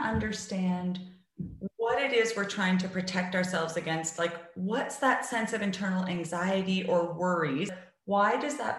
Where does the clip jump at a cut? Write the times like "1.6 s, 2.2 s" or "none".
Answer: 7.8 s